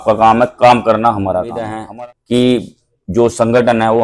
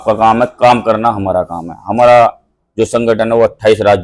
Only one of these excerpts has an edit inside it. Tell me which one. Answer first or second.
first